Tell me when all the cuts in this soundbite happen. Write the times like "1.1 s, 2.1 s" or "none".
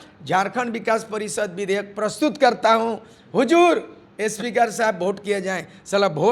none